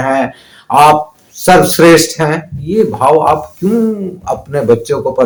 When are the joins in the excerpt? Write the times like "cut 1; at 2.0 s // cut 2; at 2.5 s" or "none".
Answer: none